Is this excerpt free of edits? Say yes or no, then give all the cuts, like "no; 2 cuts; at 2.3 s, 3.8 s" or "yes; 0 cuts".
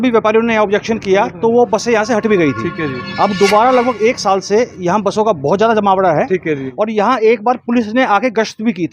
no; 1 cut; at 6.7 s